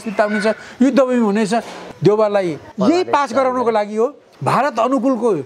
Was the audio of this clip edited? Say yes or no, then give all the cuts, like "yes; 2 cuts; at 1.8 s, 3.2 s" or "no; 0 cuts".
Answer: yes; 3 cuts; at 1.8 s, 2.7 s, 4.3 s